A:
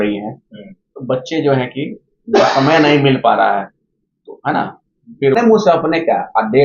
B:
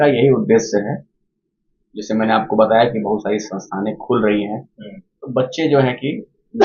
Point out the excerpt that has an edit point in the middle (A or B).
A